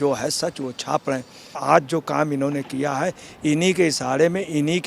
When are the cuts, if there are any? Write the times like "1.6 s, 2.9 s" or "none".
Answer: 1.6 s